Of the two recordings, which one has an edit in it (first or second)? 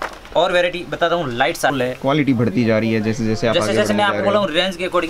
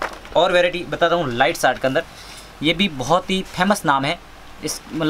first